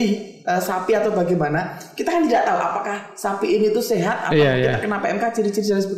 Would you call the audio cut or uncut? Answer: uncut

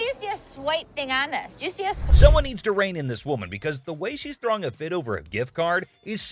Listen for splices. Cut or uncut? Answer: uncut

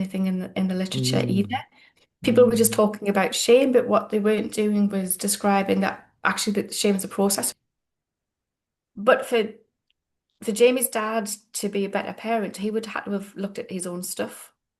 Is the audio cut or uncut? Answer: cut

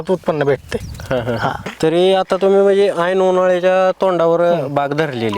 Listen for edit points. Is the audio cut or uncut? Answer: cut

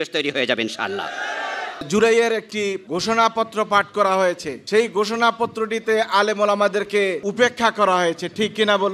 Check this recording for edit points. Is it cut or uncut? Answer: cut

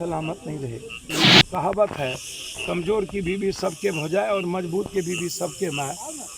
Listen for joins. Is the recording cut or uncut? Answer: cut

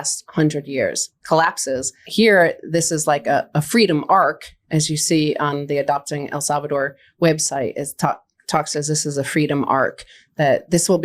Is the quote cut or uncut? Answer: cut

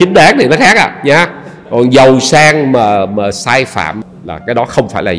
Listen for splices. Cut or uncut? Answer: cut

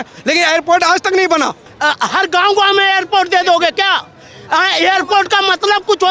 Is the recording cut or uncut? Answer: cut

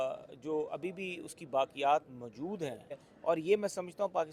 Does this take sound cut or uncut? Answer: cut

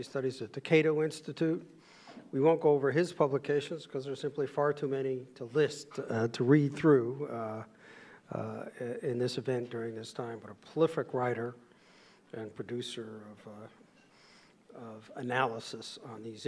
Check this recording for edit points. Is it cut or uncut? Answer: uncut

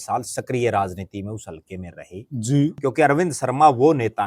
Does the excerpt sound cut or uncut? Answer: cut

